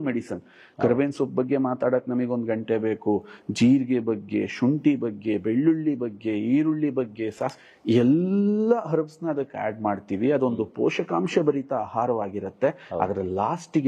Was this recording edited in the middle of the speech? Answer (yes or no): no